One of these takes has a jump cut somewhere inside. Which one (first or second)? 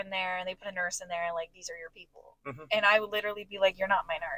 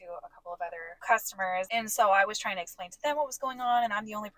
second